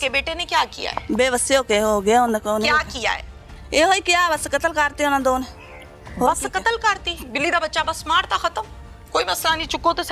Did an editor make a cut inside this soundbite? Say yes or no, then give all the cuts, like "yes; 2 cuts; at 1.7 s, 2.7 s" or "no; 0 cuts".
no; 0 cuts